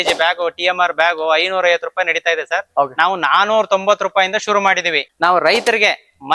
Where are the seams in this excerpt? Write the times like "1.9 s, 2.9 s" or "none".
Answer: 5.0 s